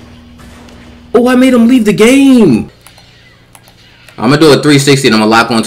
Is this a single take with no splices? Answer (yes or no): no